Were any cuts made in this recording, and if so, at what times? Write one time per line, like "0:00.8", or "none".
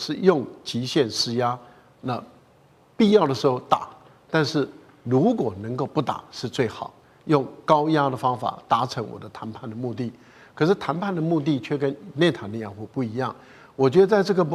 none